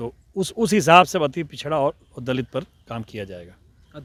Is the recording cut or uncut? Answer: uncut